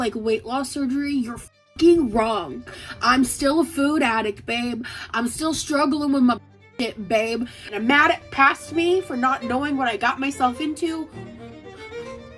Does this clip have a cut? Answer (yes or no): yes